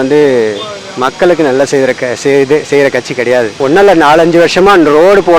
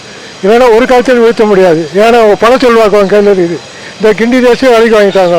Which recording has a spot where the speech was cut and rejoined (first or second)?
first